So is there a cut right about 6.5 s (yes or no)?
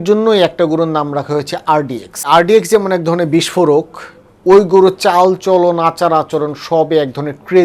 no